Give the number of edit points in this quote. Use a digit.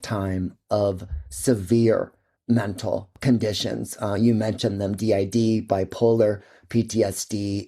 1